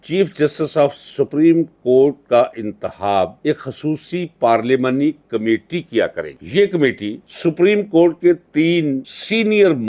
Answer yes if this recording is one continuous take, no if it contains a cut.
yes